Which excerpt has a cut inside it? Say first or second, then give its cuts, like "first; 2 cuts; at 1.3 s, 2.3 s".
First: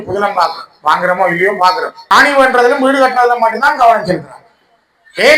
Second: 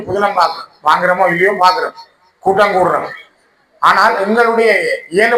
first; 1 cut; at 1.9 s